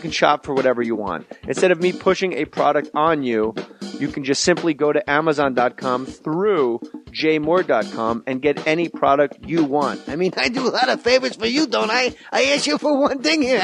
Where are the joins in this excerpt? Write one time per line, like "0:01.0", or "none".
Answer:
none